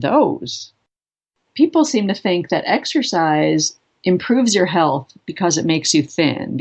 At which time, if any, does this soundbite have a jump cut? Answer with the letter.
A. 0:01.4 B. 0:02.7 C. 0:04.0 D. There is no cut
A